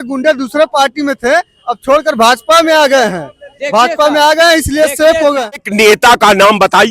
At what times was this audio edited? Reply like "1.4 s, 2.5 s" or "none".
5.7 s